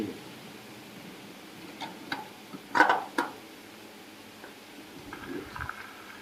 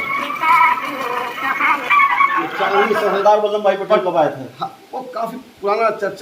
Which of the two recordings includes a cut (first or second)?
second